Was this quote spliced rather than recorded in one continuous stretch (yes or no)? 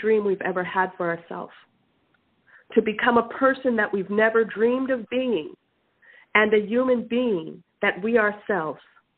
no